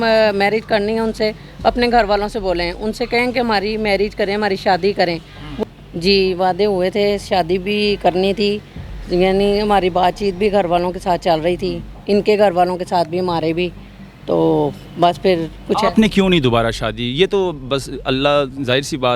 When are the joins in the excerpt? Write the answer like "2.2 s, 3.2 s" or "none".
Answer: 5.4 s